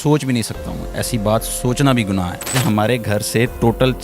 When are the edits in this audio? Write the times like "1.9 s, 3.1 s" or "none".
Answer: 2.6 s